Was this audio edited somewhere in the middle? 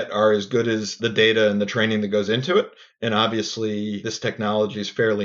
yes; 2 cuts; at 0.9 s, 4.1 s

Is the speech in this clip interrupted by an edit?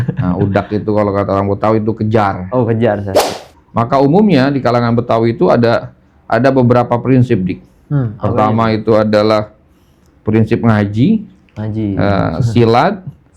yes; 1 cut; at 3.2 s

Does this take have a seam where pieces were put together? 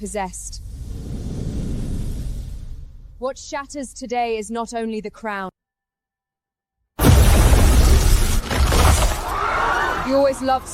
yes; 1 cut; at 5.5 s

